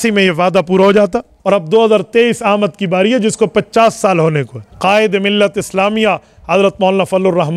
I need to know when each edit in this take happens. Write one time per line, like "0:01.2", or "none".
0:01.3
0:04.6